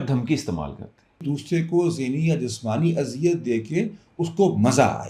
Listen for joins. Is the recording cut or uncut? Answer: cut